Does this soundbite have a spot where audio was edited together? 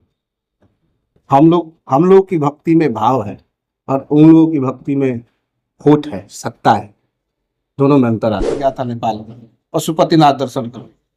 yes; 1 cut; at 8.7 s

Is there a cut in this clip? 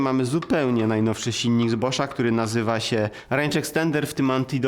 yes; 1 cut; at 3.2 s

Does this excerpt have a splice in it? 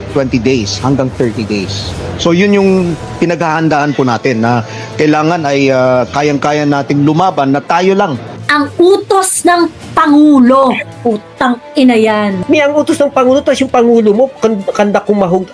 yes; 2 cuts; at 8.4 s, 12.4 s

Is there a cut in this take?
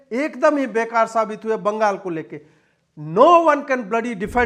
no; 0 cuts

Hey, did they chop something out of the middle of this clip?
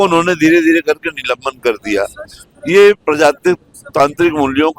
no; 0 cuts

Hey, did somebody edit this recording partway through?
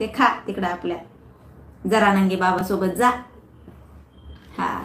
no; 0 cuts

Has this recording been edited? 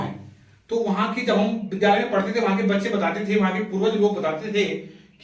no; 0 cuts

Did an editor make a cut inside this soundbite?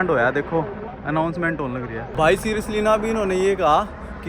yes; 1 cut; at 2.1 s

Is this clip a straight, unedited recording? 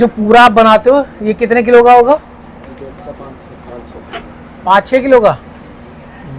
yes; 0 cuts

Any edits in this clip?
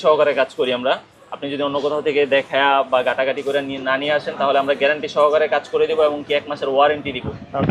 no; 0 cuts

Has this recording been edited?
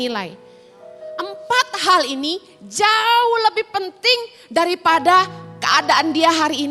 no; 0 cuts

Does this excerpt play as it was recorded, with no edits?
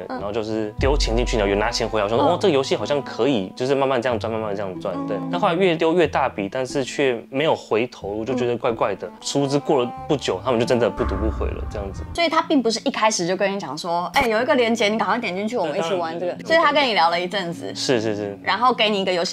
yes; 0 cuts

